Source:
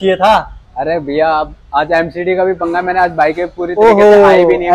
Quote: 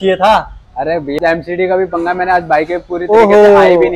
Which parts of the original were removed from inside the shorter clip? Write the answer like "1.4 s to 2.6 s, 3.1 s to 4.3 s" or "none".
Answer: 1.2 s to 1.9 s